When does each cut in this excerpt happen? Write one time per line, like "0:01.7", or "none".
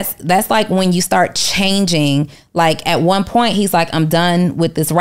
none